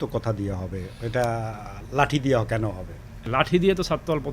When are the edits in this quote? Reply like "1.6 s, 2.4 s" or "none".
3.2 s